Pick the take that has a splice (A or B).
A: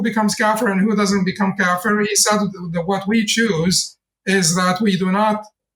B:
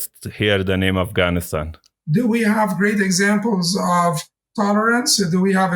B